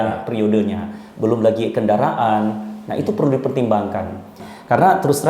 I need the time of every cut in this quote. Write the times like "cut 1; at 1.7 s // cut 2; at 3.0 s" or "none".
cut 1; at 4.4 s